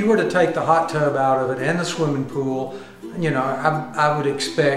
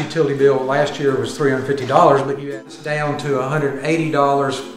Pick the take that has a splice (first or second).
second